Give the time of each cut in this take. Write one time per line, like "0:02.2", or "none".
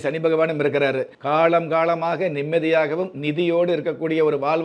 0:01.1